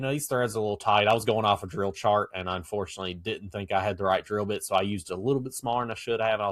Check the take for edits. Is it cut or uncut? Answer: uncut